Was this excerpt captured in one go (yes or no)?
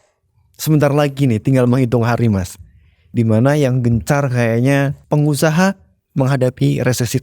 no